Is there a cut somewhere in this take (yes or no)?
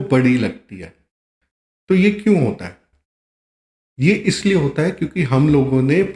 no